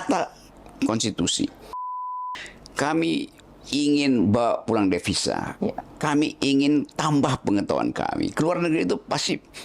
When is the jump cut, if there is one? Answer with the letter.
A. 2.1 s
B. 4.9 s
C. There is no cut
A